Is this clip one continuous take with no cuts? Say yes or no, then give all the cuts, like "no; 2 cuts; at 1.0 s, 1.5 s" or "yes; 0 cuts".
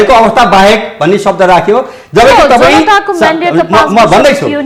yes; 0 cuts